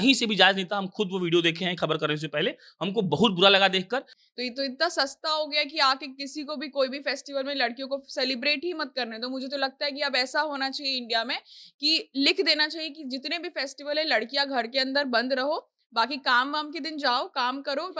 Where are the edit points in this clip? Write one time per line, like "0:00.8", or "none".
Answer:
0:04.2